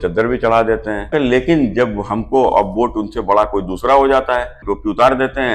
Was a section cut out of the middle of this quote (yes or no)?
yes